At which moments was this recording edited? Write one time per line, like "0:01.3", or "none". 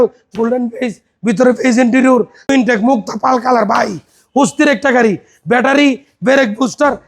0:02.5